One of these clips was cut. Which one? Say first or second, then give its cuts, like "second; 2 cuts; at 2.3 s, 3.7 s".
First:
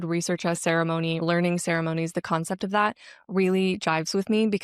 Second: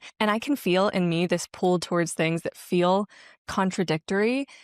first; 1 cut; at 1.2 s